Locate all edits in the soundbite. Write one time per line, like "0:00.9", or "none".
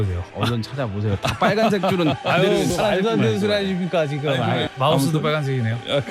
0:04.7

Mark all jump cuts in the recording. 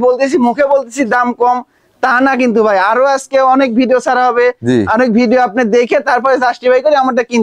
none

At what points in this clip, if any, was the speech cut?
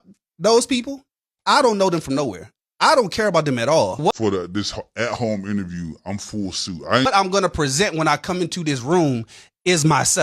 none

